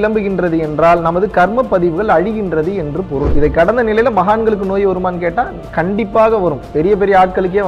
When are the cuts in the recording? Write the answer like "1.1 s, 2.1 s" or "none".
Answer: 3.3 s